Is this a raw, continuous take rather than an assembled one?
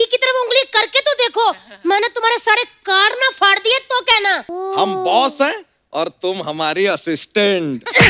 no; 1 cut; at 4.5 s

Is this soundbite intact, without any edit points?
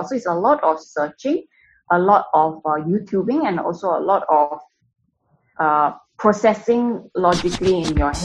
yes; 0 cuts

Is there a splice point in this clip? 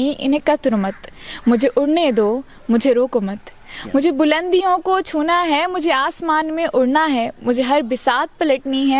no; 0 cuts

